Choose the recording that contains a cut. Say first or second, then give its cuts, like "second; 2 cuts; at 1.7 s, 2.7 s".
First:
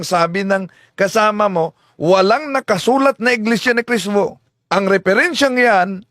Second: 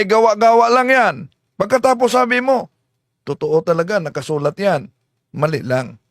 first; 1 cut; at 4.5 s